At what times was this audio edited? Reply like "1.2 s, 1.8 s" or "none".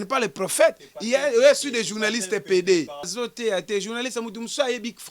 3.1 s